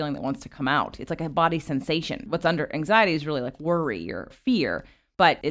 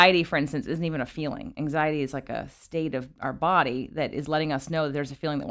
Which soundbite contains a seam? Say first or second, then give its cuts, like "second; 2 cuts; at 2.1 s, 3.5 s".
first; 2 cuts; at 2.3 s, 4.3 s